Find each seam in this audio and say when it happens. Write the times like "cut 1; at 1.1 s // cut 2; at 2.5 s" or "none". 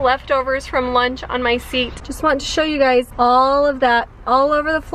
cut 1; at 2.0 s // cut 2; at 3.1 s